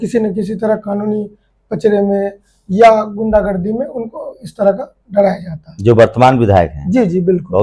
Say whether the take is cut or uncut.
uncut